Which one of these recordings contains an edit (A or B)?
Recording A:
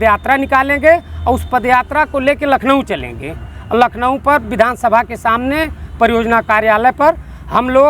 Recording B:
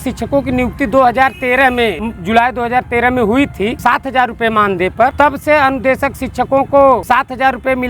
B